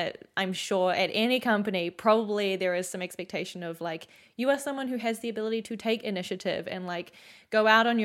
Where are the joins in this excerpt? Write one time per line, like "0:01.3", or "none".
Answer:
none